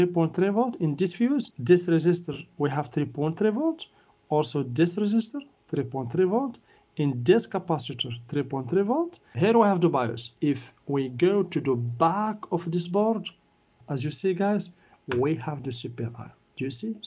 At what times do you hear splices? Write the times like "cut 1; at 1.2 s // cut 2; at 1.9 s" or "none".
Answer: cut 1; at 1.5 s // cut 2; at 9.2 s // cut 3; at 13.8 s

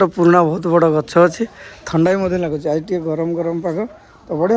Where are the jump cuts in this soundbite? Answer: none

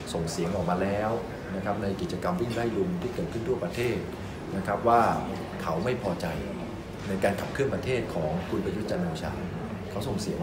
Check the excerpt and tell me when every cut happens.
none

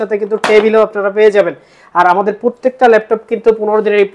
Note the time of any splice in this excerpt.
none

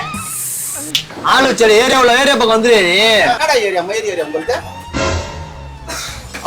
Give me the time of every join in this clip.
cut 1; at 1.1 s // cut 2; at 3.4 s

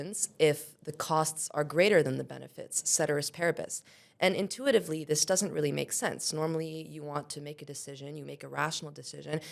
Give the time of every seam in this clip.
none

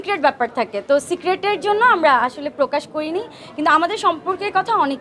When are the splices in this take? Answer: none

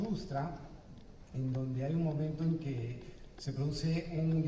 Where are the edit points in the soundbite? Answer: none

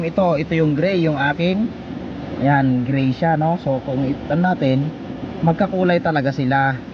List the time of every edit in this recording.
none

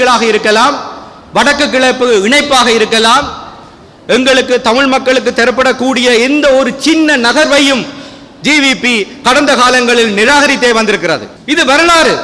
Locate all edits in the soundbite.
cut 1; at 11.3 s

